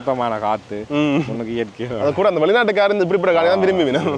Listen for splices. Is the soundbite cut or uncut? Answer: uncut